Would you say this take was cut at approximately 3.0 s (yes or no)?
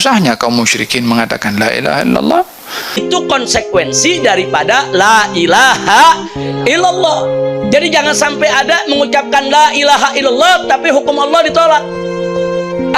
yes